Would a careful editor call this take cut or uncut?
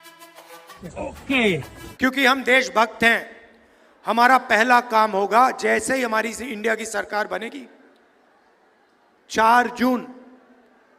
cut